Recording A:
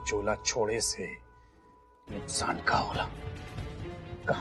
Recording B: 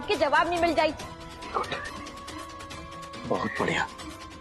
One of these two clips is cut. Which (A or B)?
B